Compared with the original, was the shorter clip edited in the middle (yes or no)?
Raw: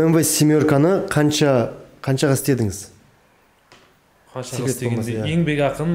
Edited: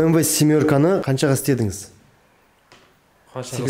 yes